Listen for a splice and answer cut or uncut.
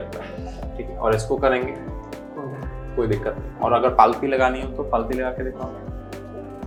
uncut